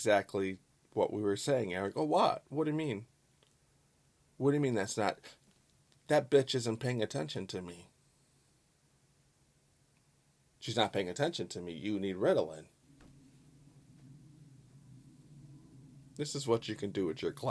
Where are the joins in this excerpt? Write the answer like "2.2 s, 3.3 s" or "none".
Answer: 12.8 s